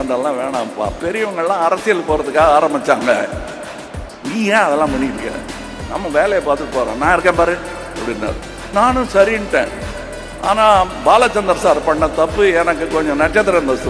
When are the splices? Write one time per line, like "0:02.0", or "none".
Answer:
none